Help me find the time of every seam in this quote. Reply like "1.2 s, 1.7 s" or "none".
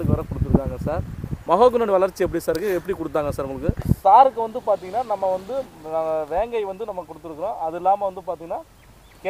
4.0 s